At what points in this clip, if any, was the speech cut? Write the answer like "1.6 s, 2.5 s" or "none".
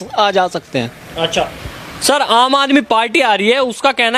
none

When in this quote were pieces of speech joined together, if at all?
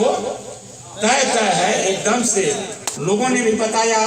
2.9 s

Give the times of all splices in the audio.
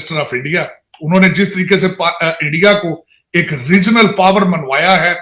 none

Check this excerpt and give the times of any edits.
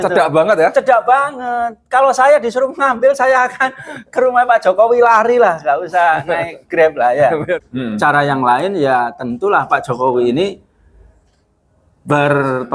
7.6 s

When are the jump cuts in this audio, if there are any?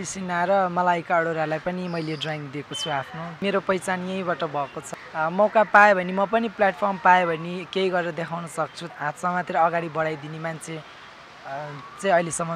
3.4 s, 4.9 s, 8.8 s

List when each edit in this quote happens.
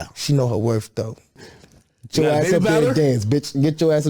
1.4 s

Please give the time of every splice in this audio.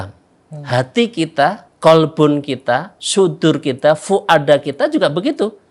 1.7 s, 3.0 s

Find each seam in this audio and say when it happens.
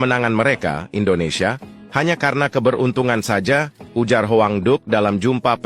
none

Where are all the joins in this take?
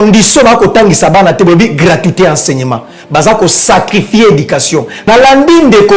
4.9 s

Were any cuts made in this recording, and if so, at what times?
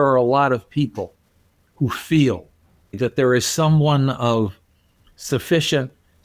2.9 s

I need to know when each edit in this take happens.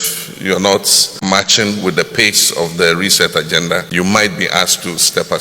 1.1 s, 3.9 s

